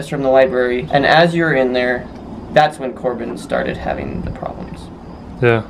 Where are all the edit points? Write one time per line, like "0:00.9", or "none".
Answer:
none